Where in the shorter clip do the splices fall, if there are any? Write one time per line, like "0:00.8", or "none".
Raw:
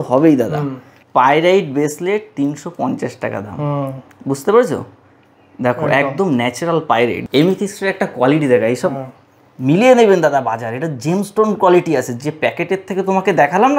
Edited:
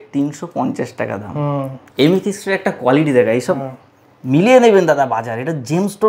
0:01.9